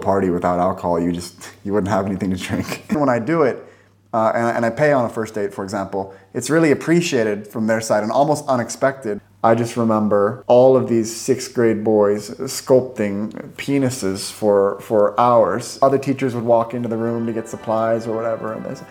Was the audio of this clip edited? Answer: yes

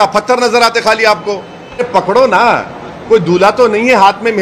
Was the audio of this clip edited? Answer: yes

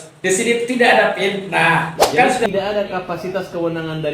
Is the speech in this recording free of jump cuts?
no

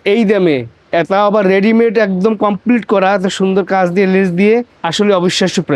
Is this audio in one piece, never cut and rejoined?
no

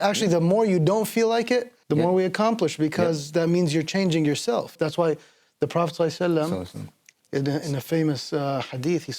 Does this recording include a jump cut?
yes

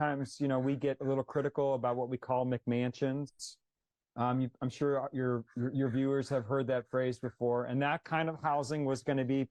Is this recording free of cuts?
yes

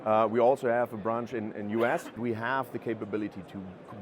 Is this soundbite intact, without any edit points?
no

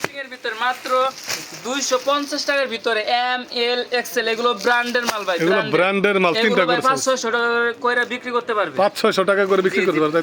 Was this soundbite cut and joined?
no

